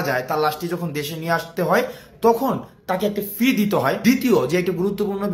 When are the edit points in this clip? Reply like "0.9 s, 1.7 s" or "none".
4.0 s